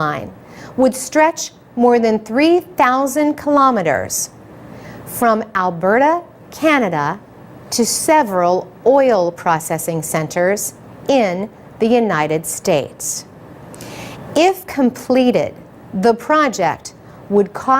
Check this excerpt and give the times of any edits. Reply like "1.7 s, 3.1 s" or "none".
8.7 s